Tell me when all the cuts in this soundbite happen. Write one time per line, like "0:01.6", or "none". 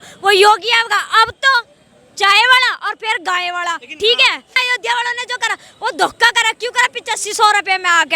0:04.5